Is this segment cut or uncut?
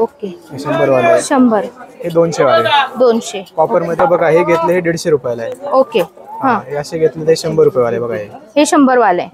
cut